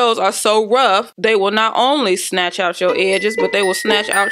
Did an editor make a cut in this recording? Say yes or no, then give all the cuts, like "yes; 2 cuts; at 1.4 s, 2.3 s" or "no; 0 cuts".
yes; 1 cut; at 1.1 s